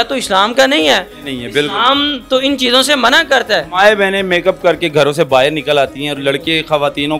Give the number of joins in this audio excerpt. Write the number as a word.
zero